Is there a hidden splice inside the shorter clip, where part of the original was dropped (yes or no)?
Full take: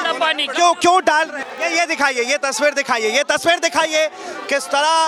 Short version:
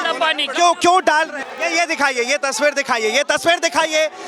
no